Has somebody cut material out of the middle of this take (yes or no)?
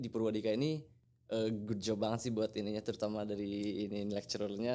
no